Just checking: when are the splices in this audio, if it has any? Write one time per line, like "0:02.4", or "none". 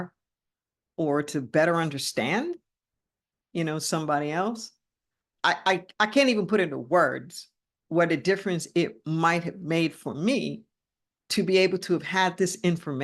0:05.3

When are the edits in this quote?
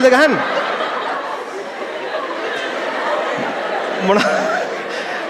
none

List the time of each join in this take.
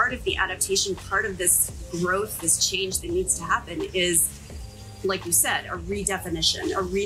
none

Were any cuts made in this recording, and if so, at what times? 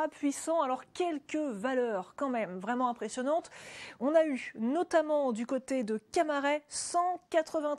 0:06.6

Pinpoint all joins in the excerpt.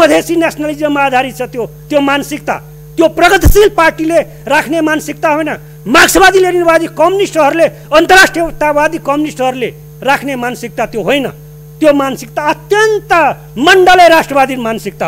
none

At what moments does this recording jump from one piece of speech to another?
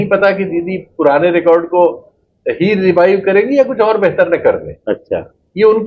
none

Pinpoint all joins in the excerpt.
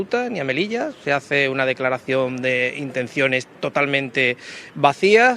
none

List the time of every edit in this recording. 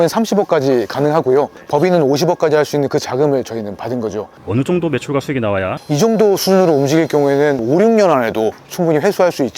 0:04.4
0:05.8

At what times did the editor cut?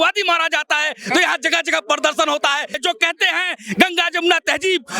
0:02.8

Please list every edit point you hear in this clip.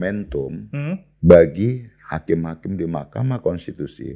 0:01.1

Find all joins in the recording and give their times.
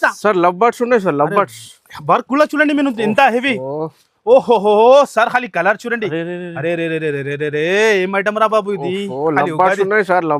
none

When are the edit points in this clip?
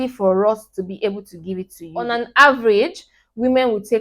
0:02.0

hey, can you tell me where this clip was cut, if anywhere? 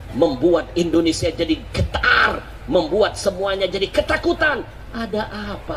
none

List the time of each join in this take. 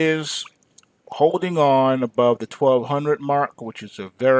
0:02.1

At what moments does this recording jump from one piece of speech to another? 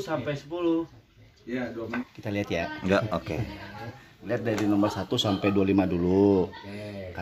0:02.0

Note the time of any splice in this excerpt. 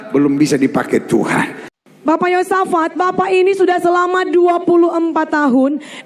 0:01.7

